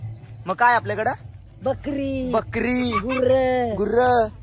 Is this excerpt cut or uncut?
uncut